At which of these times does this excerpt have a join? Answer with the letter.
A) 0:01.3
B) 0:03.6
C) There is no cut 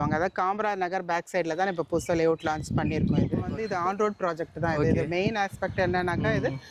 B